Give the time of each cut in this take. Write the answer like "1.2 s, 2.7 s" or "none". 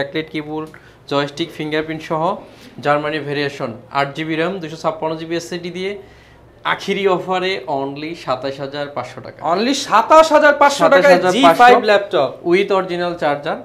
none